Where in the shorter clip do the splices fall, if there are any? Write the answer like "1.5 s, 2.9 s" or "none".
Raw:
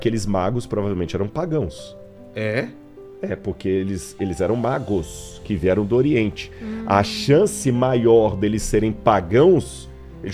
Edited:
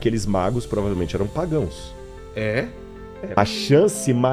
3.4 s

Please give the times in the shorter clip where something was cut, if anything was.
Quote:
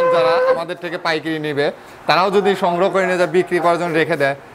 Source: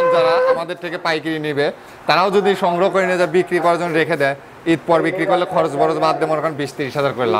none

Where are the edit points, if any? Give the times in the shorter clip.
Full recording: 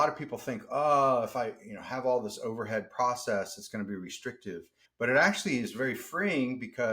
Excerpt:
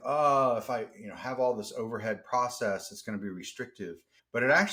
none

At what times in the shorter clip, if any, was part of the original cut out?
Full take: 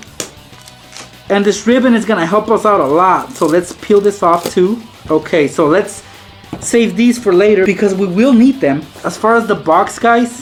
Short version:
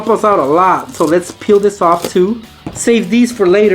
2.5 s

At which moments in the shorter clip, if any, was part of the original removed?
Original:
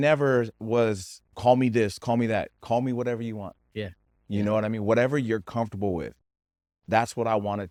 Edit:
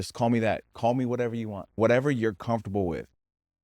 1.7 s

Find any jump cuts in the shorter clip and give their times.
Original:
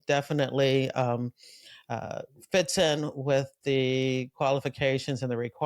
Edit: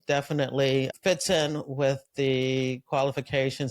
0.9 s

